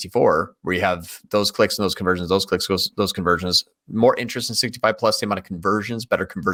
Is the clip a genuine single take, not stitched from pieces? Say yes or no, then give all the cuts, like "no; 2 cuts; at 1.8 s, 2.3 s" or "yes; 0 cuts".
yes; 0 cuts